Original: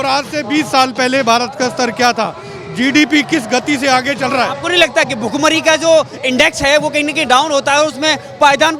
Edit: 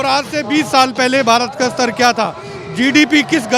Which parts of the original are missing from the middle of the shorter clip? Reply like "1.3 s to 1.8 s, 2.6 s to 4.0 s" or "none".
none